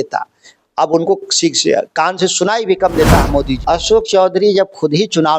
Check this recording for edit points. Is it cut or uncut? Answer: cut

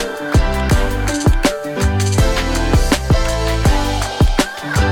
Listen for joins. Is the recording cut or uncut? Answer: uncut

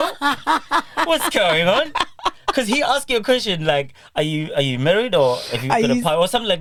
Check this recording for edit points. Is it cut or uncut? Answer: uncut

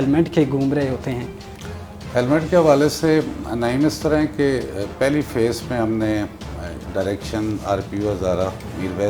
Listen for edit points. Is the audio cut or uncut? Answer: uncut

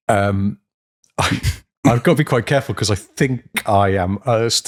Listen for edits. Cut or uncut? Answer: uncut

